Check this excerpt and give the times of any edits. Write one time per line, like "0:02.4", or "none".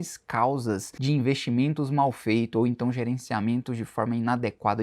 0:00.9